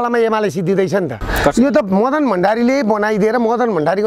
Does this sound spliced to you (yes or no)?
yes